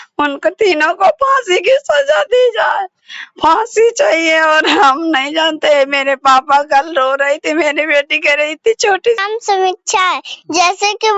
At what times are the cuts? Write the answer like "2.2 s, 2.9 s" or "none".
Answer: 9.2 s